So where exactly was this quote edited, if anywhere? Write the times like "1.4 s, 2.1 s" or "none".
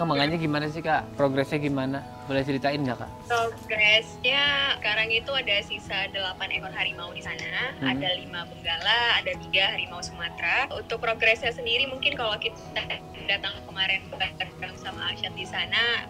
none